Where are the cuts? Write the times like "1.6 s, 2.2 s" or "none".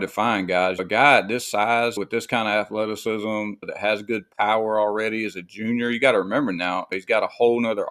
0.8 s, 2.0 s, 3.7 s, 6.9 s